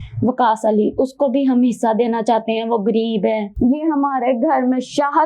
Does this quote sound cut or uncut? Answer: cut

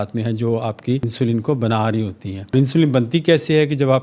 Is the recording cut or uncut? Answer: cut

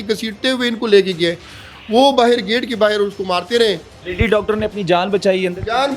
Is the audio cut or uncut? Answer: uncut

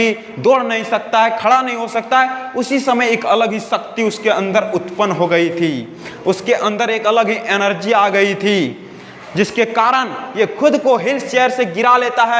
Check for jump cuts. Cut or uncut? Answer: uncut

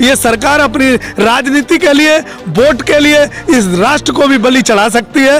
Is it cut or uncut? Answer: uncut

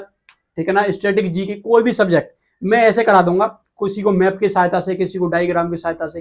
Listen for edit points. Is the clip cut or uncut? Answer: uncut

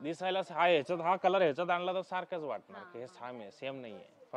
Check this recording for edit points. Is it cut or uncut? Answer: uncut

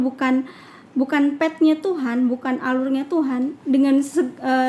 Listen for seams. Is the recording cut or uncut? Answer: uncut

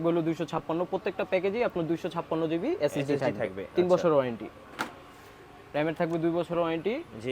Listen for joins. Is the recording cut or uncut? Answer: uncut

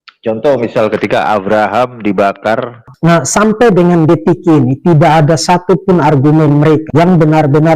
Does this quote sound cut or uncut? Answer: cut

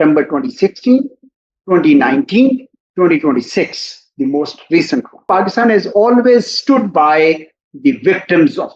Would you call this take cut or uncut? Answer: cut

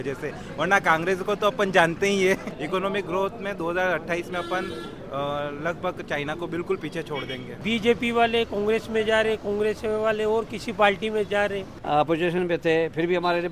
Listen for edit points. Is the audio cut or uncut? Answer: cut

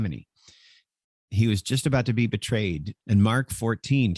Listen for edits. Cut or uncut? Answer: cut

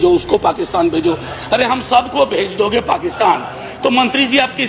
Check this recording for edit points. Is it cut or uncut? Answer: uncut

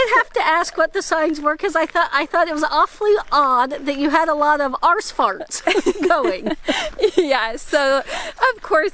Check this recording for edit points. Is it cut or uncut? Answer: uncut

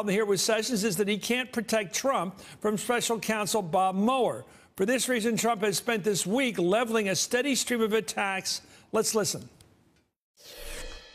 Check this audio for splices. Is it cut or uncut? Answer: cut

